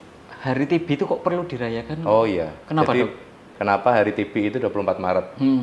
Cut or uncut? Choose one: cut